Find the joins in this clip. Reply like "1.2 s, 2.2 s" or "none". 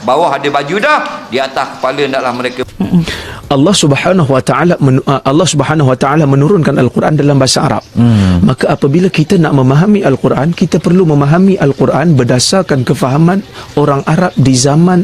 2.6 s